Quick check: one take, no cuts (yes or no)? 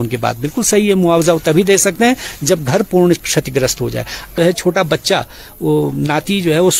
no